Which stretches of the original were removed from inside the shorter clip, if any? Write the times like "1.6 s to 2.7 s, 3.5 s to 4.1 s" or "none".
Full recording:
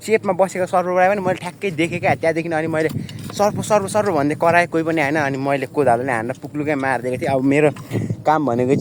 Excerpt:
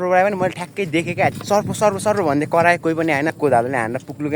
2.2 s to 3.2 s, 5.2 s to 5.7 s